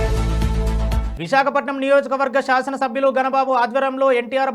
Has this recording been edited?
no; 0 cuts

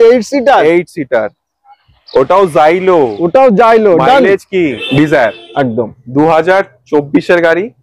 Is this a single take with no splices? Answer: no; 1 cut; at 4.8 s

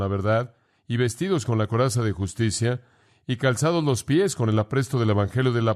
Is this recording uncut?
yes; 0 cuts

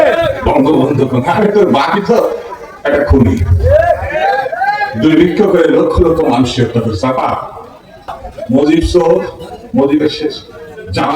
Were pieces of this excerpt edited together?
yes; 1 cut; at 8.2 s

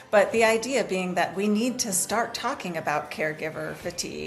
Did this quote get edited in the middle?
no; 0 cuts

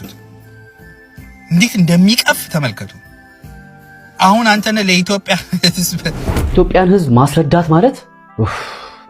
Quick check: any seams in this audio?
yes; 1 cut; at 6.5 s

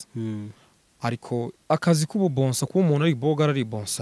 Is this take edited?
yes; 1 cut; at 1.6 s

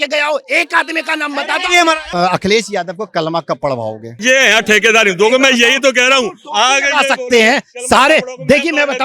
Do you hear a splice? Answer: yes; 2 cuts; at 2.1 s, 4.1 s

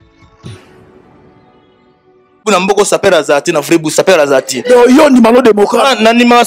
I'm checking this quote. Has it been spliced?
yes; 1 cut; at 2.5 s

